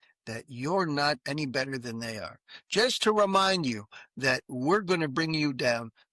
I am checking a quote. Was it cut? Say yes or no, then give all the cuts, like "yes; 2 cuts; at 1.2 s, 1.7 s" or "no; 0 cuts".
no; 0 cuts